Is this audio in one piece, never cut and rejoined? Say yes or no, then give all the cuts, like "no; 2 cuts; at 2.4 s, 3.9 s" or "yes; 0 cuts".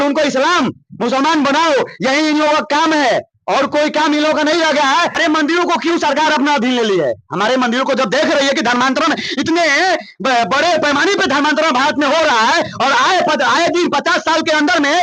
no; 1 cut; at 5.2 s